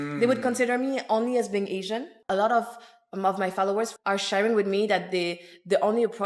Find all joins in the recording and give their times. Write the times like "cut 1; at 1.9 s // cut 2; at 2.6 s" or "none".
cut 1; at 2.2 s // cut 2; at 4.0 s